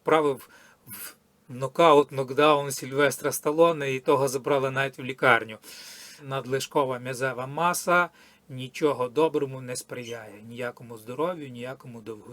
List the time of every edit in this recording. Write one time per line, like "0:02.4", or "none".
0:06.3